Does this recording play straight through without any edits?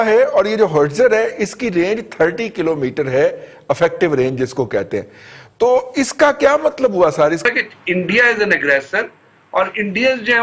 no; 1 cut; at 7.4 s

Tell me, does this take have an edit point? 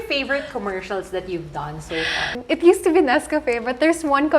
yes; 1 cut; at 2.4 s

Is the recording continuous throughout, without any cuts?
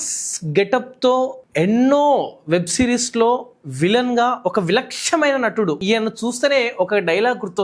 no; 1 cut; at 5.8 s

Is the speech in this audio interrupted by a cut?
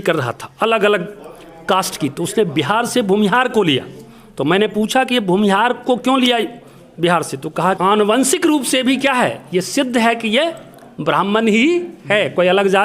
yes; 1 cut; at 7.8 s

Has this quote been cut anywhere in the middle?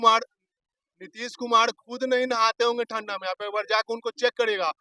no; 0 cuts

